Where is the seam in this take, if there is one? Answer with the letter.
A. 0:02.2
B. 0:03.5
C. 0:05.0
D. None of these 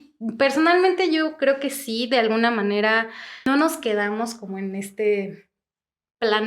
B